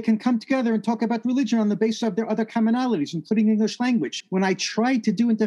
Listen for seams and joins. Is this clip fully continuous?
no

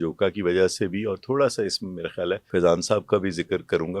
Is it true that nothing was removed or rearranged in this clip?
no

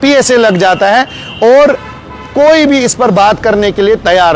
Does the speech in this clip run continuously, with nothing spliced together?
yes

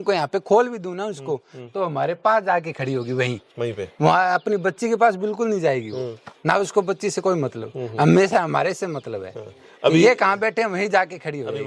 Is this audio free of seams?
yes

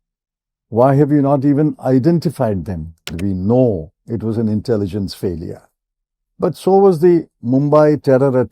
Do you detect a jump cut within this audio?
yes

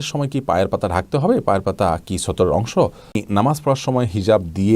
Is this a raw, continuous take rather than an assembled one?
no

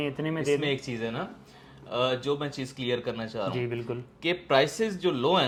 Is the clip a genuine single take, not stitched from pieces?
yes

